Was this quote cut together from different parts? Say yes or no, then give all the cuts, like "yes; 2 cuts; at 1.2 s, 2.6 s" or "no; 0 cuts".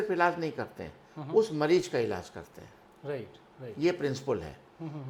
no; 0 cuts